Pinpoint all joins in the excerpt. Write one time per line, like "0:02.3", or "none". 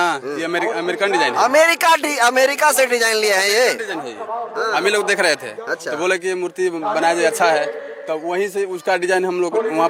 none